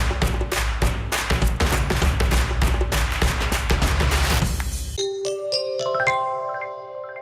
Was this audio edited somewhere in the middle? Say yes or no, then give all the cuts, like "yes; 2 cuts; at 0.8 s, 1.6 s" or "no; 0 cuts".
yes; 1 cut; at 4.8 s